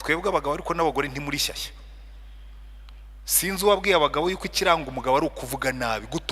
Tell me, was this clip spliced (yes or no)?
no